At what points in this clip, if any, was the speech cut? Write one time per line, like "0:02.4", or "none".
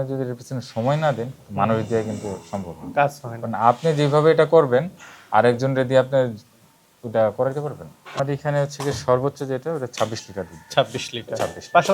0:08.2